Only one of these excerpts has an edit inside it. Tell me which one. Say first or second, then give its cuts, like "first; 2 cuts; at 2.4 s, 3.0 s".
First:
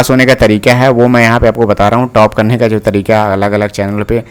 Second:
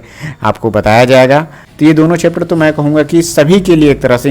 second; 1 cut; at 1.6 s